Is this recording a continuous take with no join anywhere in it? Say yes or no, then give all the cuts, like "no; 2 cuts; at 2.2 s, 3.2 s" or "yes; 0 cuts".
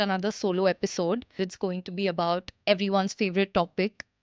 no; 2 cuts; at 1.4 s, 2.5 s